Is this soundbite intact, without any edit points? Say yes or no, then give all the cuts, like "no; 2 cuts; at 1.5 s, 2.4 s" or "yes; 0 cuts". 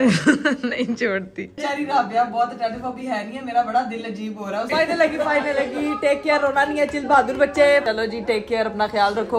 no; 3 cuts; at 1.5 s, 4.7 s, 7.8 s